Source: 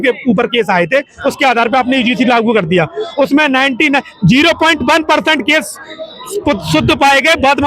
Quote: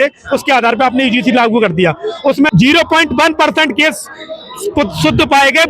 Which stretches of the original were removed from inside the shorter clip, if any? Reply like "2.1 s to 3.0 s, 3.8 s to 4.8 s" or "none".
3.4 s to 4.2 s